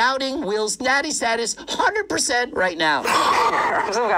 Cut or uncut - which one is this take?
cut